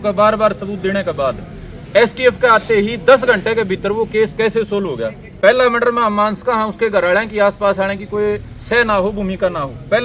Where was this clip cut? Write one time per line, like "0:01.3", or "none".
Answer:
0:05.2